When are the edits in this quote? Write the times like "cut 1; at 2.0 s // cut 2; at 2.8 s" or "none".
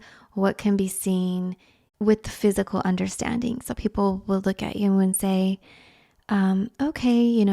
cut 1; at 1.8 s